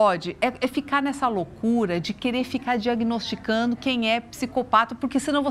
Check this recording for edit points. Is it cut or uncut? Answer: uncut